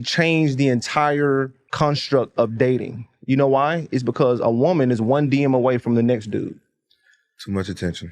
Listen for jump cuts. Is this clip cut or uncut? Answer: cut